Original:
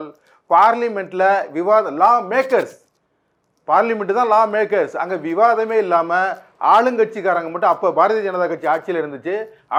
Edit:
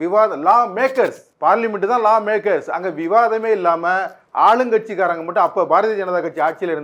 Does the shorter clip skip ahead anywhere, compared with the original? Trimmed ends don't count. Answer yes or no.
yes